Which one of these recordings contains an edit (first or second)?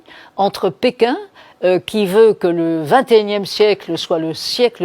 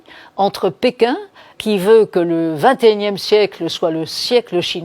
second